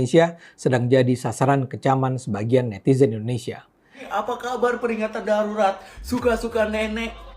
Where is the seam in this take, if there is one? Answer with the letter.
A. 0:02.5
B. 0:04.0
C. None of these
B